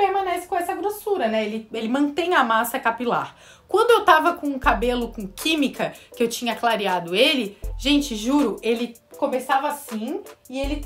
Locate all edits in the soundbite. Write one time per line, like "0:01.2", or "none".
none